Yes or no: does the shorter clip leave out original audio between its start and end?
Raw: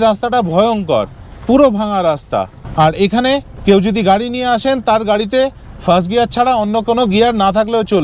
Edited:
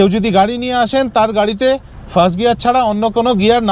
no